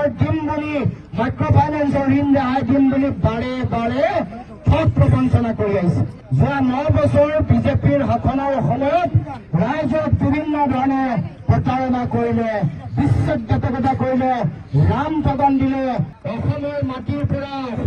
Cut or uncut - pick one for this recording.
cut